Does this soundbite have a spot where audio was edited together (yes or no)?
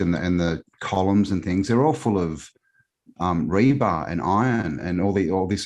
no